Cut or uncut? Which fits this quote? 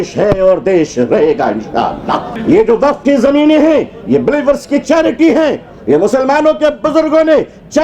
cut